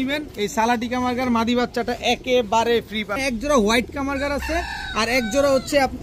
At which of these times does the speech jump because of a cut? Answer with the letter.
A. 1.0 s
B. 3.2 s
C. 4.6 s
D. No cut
B